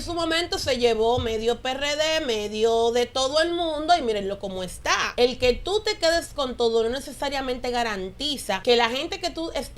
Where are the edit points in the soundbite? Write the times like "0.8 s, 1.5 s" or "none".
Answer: 5.1 s, 8.6 s